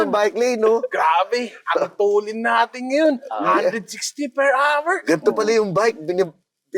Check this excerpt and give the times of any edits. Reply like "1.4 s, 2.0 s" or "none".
none

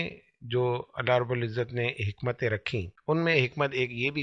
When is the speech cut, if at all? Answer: 2.9 s

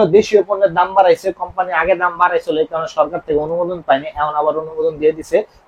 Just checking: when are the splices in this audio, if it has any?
none

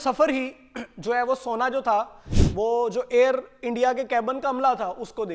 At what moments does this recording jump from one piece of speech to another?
none

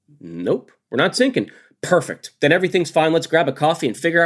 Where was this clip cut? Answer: none

